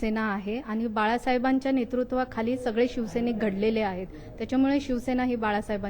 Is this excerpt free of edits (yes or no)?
yes